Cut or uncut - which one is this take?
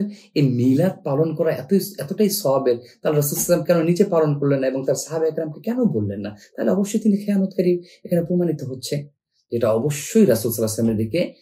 uncut